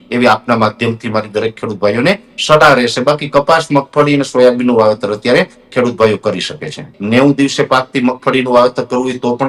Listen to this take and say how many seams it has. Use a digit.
1